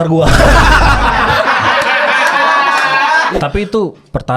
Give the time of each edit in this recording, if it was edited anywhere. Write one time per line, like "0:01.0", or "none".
0:03.3